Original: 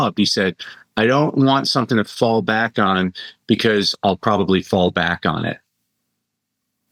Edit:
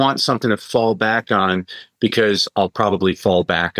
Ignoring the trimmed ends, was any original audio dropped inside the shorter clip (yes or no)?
no